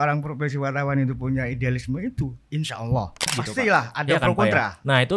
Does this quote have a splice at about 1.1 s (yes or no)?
no